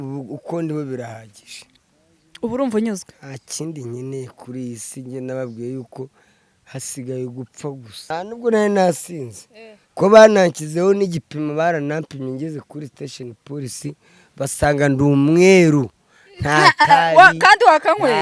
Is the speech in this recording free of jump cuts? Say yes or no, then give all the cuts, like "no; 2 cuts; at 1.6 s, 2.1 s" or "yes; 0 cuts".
no; 1 cut; at 8.1 s